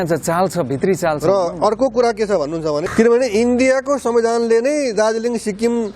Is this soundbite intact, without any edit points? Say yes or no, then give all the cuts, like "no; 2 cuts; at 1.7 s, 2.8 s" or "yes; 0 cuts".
no; 1 cut; at 2.8 s